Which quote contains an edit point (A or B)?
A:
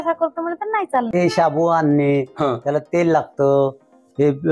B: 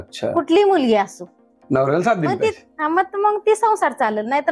A